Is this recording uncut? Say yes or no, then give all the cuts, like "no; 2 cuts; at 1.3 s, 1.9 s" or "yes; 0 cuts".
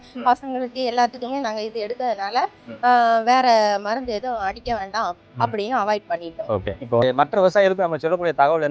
no; 1 cut; at 7.0 s